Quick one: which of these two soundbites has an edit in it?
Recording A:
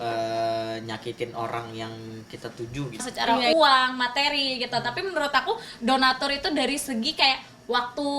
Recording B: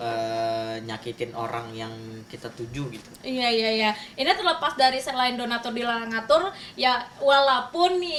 A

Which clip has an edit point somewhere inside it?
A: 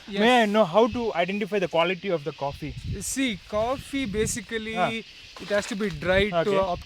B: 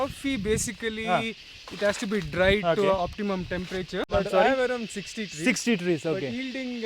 B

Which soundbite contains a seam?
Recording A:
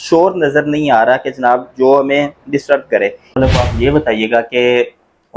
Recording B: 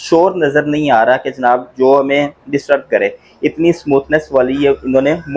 A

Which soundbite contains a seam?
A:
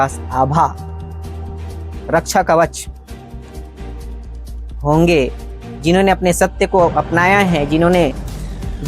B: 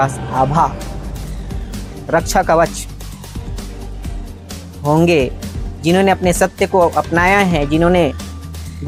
A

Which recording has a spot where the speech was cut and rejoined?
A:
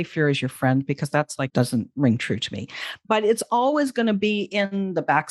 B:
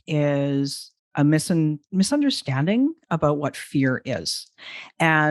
A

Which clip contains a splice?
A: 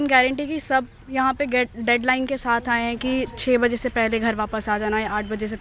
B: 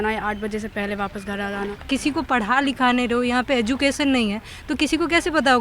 B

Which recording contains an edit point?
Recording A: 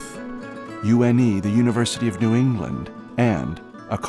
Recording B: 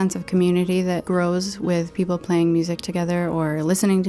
B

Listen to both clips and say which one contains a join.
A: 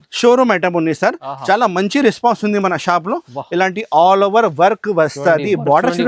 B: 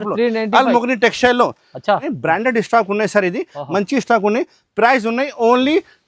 B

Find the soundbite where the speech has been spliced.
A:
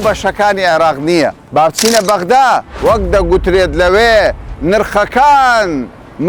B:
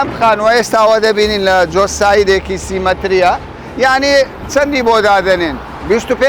A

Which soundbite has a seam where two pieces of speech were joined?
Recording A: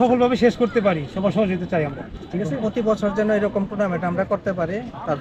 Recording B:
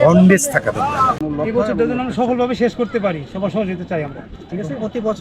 B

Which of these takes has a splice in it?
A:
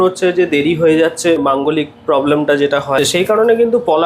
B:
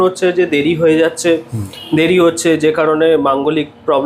A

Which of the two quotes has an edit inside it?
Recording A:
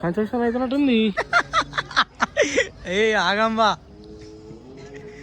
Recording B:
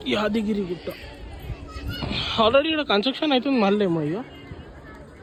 A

